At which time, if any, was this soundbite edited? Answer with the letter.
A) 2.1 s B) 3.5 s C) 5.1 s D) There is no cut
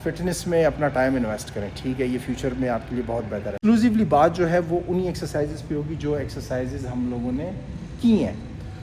B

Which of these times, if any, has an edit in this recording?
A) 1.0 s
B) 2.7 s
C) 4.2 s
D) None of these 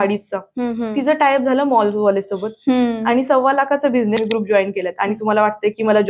C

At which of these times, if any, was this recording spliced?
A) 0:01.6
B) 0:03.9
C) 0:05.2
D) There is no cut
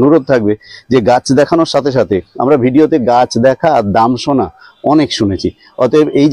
D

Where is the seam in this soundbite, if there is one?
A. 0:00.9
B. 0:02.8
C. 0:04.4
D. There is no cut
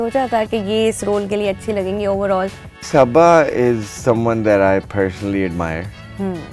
B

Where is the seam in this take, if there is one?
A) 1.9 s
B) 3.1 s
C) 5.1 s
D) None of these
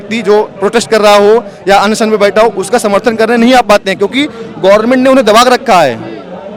D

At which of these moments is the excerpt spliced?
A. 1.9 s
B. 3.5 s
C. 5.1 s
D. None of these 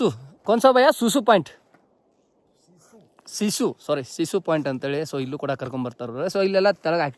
D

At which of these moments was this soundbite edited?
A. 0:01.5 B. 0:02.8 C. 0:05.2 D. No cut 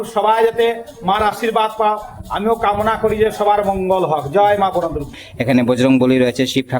C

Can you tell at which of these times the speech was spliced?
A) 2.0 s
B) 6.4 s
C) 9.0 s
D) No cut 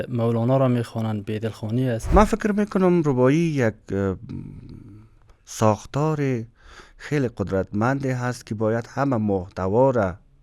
A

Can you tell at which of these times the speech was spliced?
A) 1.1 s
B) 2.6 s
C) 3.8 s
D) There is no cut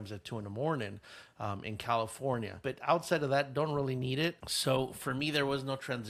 D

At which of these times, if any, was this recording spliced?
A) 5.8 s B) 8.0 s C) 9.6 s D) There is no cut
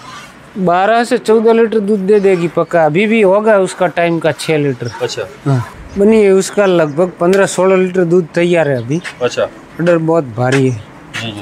A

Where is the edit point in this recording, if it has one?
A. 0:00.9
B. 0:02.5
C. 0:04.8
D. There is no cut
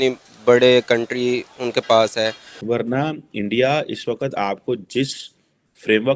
B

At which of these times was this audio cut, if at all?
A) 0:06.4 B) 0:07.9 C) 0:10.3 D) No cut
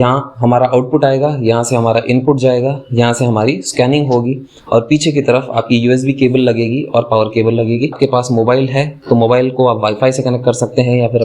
B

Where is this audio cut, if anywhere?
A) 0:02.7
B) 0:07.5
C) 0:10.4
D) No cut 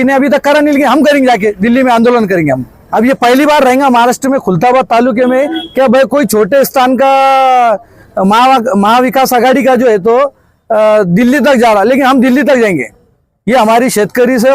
A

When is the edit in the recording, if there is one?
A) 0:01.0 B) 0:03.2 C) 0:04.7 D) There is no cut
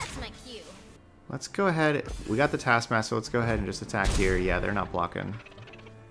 A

